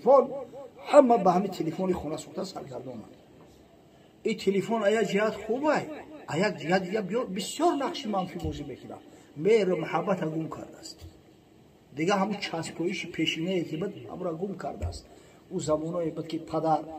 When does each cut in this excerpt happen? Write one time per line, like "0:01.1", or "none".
none